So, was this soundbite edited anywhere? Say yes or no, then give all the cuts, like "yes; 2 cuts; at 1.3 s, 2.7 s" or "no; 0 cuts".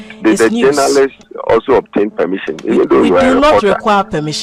no; 0 cuts